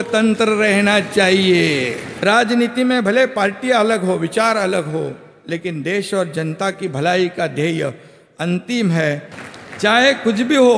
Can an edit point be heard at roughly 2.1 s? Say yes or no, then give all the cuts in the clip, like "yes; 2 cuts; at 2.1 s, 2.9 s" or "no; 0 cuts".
yes; 2 cuts; at 2.1 s, 9.4 s